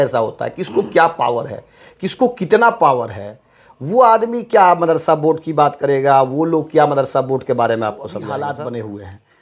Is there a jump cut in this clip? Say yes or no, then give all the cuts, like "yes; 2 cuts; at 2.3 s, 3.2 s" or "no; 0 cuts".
yes; 1 cut; at 8.2 s